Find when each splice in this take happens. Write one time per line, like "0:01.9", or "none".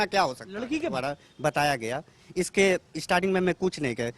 0:00.9